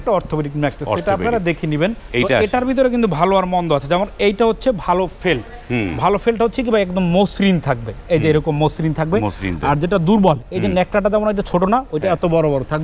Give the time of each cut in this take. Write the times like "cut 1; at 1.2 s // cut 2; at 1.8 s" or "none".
cut 1; at 2.0 s